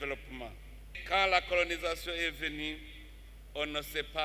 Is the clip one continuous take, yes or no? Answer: no